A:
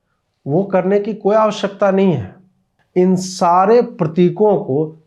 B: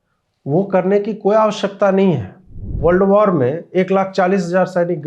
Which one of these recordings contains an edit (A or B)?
B